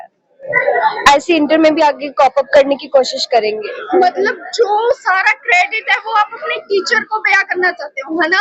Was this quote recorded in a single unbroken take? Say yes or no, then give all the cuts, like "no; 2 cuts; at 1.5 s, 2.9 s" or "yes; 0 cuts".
yes; 0 cuts